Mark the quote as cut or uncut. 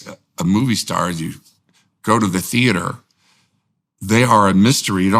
uncut